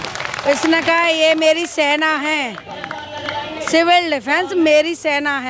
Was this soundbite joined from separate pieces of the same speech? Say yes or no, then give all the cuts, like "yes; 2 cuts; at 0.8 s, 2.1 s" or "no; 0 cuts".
no; 0 cuts